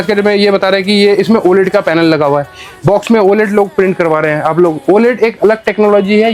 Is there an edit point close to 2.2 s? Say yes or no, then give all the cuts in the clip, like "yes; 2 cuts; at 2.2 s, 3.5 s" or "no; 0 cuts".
no; 0 cuts